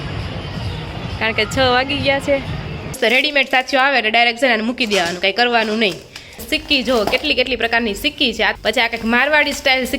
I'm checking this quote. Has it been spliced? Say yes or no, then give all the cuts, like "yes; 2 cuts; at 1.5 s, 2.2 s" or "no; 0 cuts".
yes; 3 cuts; at 3.0 s, 6.5 s, 8.5 s